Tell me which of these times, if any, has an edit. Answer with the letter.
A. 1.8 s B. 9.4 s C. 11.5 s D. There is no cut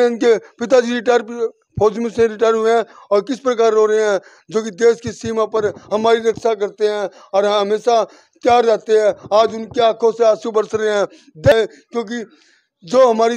C